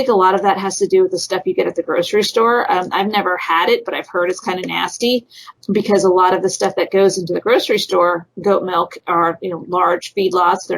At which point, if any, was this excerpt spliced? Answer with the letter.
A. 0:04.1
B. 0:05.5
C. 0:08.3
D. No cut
B